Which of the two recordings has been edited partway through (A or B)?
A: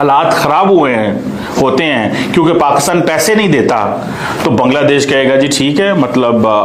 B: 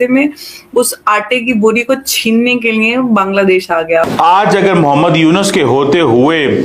B